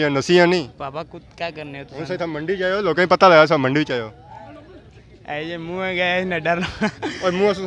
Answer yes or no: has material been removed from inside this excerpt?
no